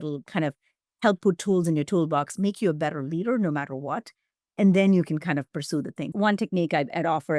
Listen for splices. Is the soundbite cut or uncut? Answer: cut